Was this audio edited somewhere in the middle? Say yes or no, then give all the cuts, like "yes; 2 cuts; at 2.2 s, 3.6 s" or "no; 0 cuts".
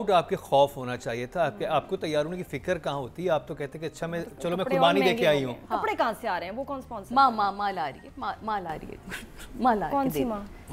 no; 0 cuts